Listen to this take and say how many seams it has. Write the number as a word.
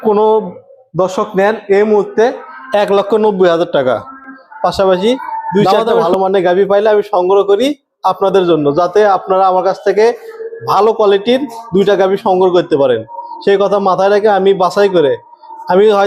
one